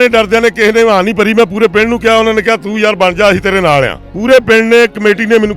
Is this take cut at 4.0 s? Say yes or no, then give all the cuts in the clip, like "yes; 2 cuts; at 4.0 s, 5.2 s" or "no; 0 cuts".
yes; 1 cut; at 4.0 s